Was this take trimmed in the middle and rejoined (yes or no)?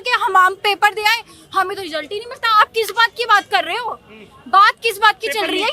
no